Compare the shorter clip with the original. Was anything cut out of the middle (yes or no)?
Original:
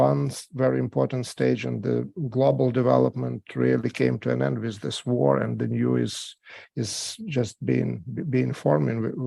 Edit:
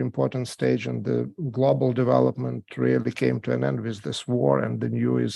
no